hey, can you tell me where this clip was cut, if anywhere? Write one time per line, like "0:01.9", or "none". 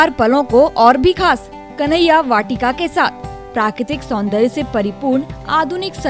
none